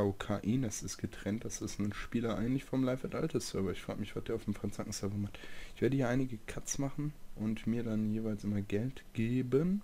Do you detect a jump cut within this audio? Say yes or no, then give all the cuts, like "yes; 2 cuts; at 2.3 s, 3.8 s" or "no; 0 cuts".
yes; 1 cut; at 2.6 s